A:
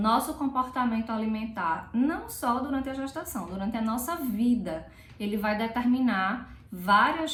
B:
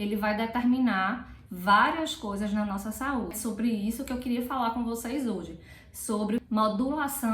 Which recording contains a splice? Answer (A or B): B